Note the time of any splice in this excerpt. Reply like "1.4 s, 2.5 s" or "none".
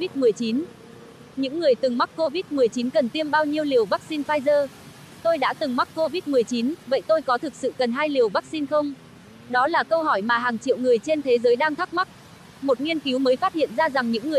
1.3 s